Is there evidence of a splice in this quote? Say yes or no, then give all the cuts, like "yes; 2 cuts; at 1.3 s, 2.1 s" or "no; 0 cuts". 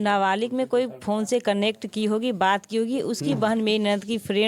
no; 0 cuts